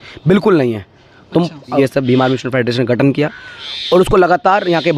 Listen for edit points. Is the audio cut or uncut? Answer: cut